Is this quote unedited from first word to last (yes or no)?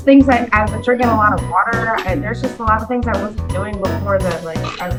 yes